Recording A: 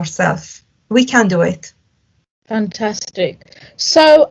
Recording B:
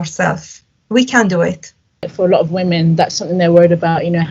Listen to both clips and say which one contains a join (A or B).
B